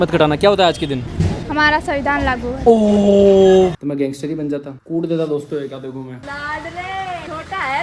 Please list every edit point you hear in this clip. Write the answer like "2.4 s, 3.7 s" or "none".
3.8 s, 6.2 s